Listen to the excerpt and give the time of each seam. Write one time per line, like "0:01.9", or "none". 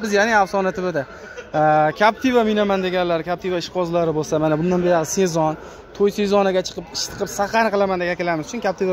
none